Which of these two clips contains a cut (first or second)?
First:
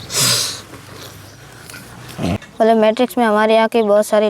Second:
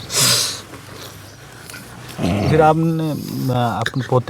first